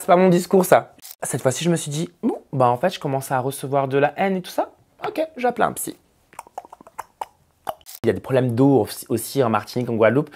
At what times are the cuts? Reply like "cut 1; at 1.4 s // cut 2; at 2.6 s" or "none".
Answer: cut 1; at 0.9 s // cut 2; at 7.8 s